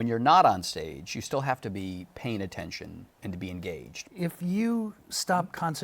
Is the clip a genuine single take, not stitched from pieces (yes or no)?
no